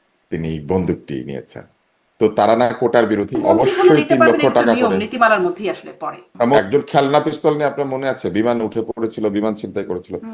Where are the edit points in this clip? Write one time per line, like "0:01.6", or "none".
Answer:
0:03.4
0:06.6